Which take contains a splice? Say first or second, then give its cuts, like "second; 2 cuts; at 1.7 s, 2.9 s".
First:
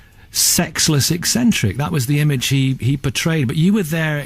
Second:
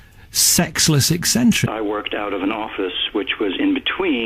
first; 1 cut; at 1.6 s